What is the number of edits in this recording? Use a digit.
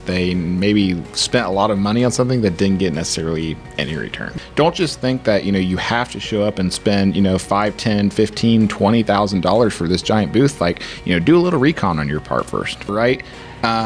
2